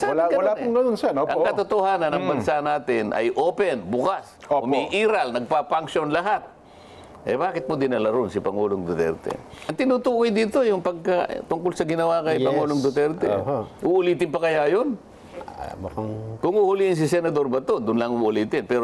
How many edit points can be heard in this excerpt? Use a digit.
1